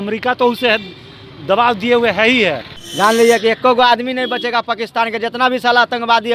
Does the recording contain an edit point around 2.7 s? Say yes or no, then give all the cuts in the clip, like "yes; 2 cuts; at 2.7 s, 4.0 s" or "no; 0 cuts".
yes; 1 cut; at 2.7 s